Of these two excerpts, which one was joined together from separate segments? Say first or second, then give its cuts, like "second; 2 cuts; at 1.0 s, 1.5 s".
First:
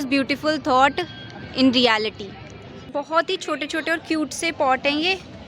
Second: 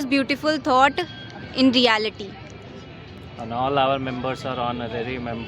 first; 1 cut; at 2.9 s